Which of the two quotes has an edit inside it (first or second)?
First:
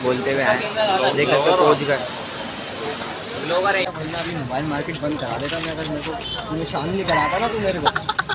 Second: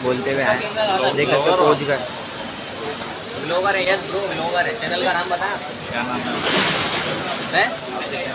first